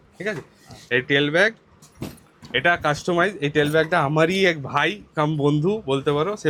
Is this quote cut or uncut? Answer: uncut